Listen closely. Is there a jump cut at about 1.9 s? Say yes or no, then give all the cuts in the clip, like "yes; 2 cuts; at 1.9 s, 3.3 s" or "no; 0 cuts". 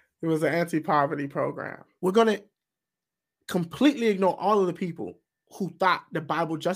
yes; 1 cut; at 1.9 s